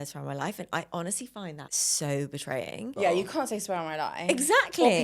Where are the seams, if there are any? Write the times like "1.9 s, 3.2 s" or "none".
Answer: 1.7 s, 2.9 s